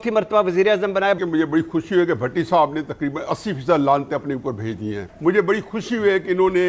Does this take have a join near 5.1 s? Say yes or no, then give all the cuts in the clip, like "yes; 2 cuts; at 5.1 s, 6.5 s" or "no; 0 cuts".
yes; 2 cuts; at 1.2 s, 5.1 s